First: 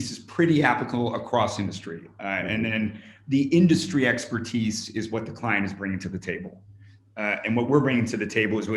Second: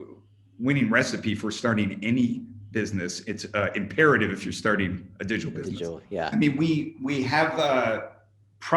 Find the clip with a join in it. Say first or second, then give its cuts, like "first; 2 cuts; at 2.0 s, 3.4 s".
second; 1 cut; at 6.3 s